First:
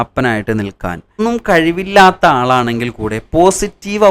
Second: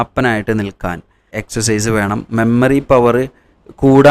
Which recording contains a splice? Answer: first; 1 cut; at 1.2 s

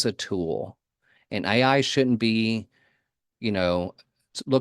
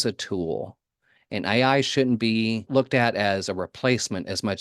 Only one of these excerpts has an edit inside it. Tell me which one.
second; 1 cut; at 2.6 s

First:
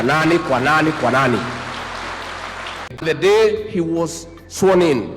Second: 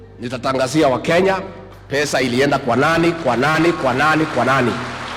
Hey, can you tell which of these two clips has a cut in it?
first; 1 cut; at 3.0 s

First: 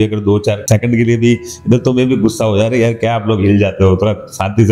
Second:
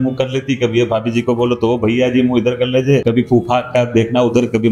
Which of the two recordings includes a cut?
second; 1 cut; at 3.0 s

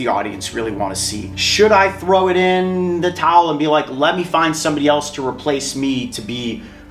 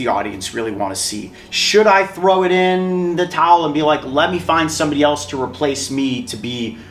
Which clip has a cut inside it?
first; 1 cut; at 1.4 s

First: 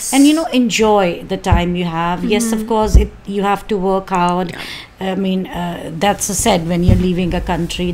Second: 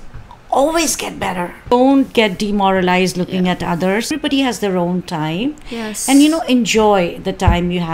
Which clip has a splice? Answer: second; 2 cuts; at 1.7 s, 4.1 s

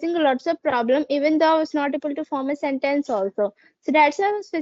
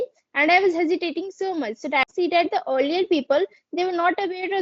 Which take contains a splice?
second; 1 cut; at 2.1 s

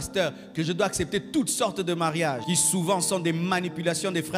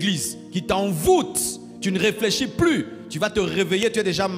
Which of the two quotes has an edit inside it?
first; 1 cut; at 2.4 s

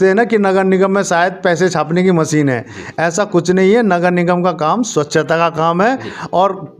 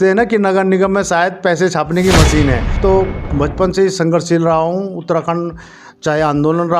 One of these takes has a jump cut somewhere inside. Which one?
second; 1 cut; at 2.8 s

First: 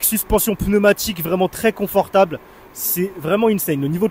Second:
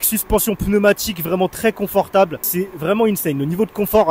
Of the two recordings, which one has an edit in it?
second; 1 cut; at 2.4 s

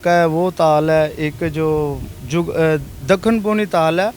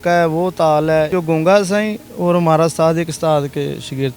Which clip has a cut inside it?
second; 1 cut; at 1.1 s

